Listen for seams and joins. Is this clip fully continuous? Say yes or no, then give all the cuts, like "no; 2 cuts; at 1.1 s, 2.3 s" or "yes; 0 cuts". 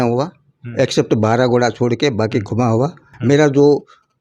no; 1 cut; at 3.1 s